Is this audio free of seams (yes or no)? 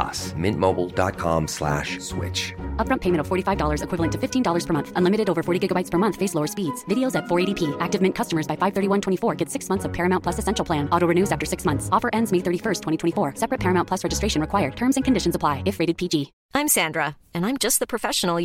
no